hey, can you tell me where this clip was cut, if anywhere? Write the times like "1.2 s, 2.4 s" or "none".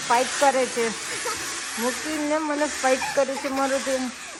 none

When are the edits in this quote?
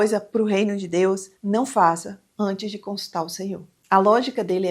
3.7 s

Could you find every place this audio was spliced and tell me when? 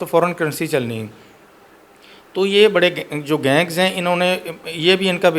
none

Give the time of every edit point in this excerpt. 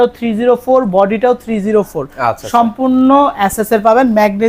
none

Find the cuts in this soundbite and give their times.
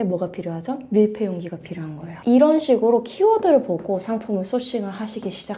none

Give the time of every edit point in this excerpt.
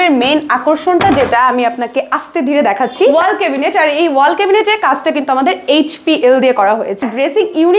3.1 s, 7.0 s

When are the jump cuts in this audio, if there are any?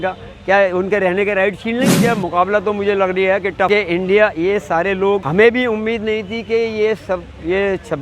2.0 s, 3.7 s, 5.3 s

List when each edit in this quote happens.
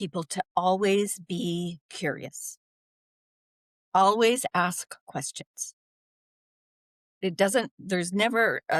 none

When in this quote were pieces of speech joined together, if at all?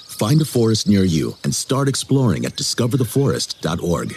none

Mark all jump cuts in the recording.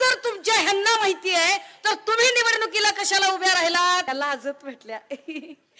4.1 s

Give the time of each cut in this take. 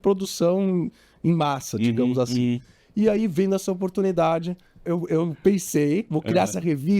4.8 s

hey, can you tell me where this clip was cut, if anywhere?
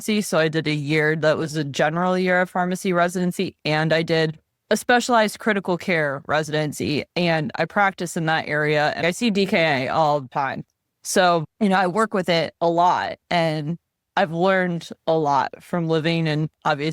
9.0 s, 10.3 s

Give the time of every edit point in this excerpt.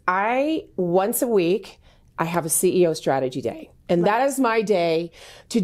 none

